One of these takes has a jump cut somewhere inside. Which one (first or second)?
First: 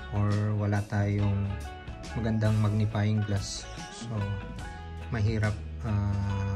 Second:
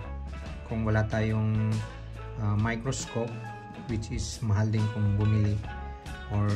first